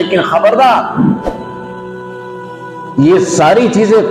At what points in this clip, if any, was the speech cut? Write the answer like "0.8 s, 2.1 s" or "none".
1.4 s, 2.9 s